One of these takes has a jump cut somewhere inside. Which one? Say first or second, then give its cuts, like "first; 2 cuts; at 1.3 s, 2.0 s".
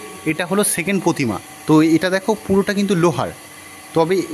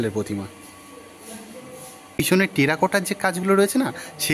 second; 1 cut; at 2.2 s